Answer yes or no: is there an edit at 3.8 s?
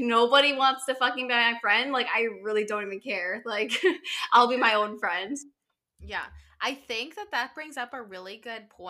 no